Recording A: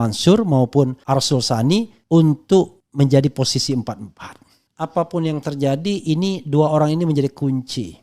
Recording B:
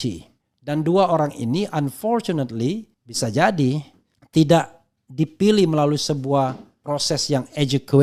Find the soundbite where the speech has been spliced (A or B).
A